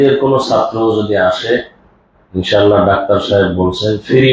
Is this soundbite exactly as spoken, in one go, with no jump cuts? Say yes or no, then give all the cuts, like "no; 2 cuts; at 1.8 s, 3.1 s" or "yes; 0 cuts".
yes; 0 cuts